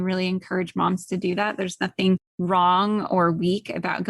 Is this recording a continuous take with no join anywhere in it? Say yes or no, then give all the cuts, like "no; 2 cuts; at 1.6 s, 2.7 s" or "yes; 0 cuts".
no; 1 cut; at 2.3 s